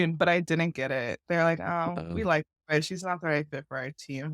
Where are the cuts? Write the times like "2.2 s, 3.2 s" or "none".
none